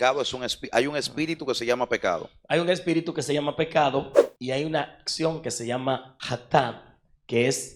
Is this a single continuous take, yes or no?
no